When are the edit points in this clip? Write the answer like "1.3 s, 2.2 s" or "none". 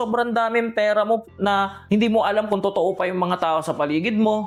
none